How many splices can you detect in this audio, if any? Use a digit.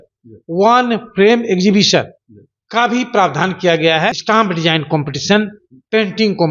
1